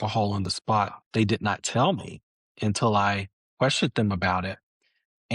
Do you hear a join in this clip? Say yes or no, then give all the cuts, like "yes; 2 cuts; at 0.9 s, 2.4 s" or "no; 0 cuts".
yes; 1 cut; at 1.0 s